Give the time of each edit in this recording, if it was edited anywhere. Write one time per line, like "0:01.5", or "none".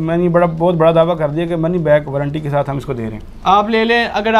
none